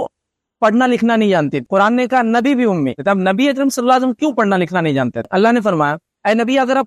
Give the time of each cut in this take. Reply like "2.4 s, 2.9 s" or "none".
1.6 s, 3.0 s, 5.2 s